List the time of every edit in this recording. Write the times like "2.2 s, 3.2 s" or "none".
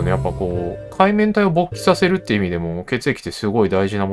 none